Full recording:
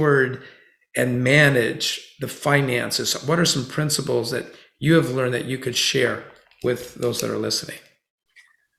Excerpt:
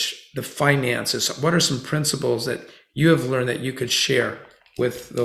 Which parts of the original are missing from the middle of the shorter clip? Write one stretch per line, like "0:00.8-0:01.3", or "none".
none

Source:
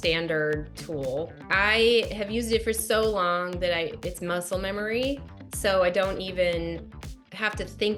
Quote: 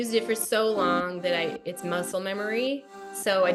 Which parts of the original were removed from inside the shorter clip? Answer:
none

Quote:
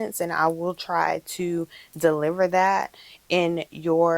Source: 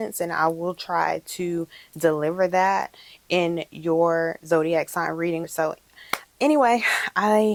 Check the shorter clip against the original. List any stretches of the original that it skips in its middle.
none

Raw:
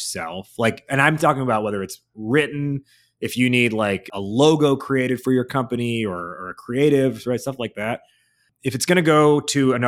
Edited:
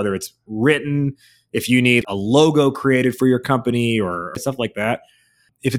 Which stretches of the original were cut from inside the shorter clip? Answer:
0:03.7-0:04.1
0:06.5-0:07.5

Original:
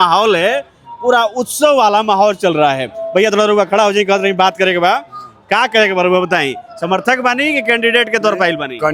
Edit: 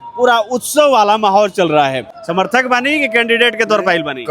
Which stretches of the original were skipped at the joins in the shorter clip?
0:03.0-0:06.6

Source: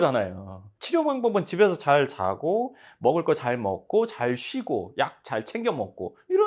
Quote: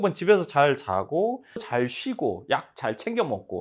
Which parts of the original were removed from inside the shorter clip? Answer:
0:03.0-0:04.1

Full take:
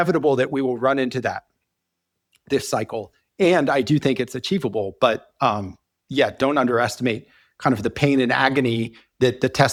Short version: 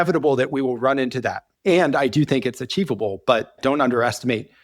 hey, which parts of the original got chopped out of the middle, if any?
0:01.5-0:03.2
0:05.3-0:06.3

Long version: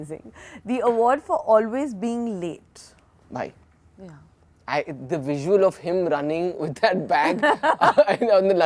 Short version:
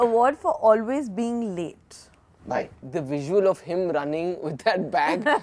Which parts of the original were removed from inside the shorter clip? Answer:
0:03.7-0:05.0

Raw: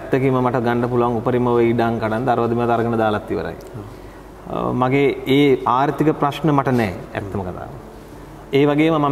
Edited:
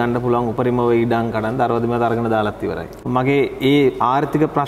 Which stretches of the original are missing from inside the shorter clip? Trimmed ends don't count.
0:03.7-0:04.7

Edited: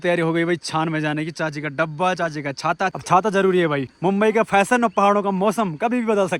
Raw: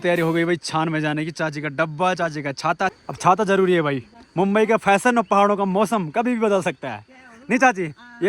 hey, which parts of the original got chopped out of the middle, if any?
0:03.0-0:03.1
0:04.0-0:04.2

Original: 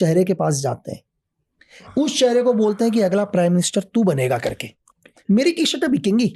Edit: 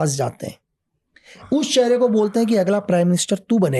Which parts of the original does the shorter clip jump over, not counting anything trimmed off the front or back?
none

